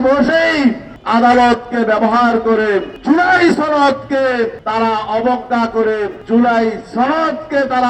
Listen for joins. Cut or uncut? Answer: cut